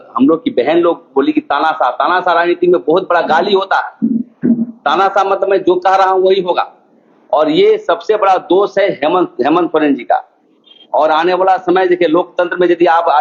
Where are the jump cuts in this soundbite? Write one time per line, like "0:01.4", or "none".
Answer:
none